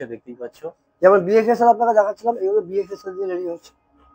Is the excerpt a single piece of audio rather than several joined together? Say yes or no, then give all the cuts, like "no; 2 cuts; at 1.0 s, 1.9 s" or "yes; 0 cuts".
yes; 0 cuts